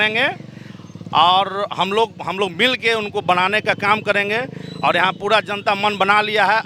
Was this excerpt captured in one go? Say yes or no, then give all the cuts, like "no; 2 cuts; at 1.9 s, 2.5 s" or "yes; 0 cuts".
yes; 0 cuts